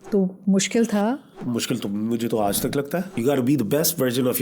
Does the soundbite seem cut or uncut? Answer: cut